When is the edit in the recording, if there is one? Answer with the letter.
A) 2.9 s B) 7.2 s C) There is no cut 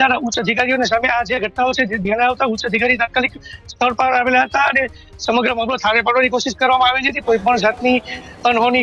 B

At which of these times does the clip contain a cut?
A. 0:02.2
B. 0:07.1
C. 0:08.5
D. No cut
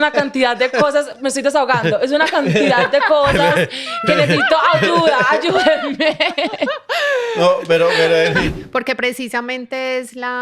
C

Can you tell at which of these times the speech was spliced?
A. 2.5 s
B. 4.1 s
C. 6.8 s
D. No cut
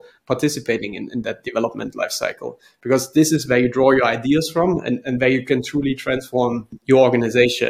C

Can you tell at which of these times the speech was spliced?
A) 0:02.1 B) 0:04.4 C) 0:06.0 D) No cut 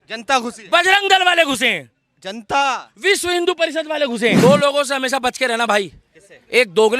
B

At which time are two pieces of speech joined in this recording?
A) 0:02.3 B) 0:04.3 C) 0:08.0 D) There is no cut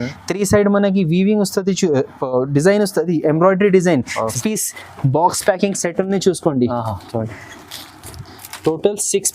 B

